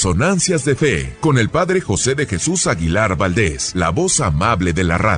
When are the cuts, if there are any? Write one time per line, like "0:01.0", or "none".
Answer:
0:01.1
0:03.6